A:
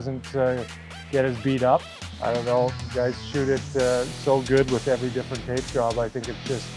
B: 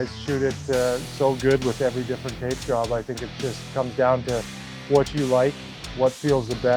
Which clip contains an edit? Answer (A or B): A